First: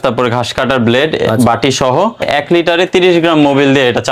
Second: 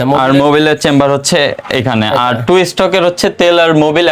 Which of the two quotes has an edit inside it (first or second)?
first